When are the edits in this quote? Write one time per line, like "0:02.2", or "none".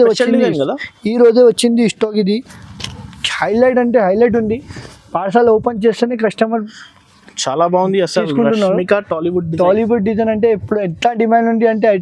none